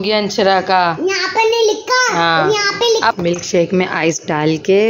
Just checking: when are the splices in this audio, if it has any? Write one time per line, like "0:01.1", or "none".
0:03.1